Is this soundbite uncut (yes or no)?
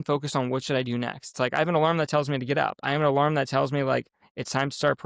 yes